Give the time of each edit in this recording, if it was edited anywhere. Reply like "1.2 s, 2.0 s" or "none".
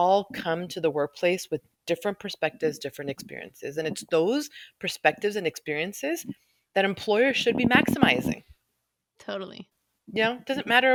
none